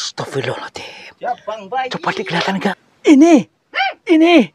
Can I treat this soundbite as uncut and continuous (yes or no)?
no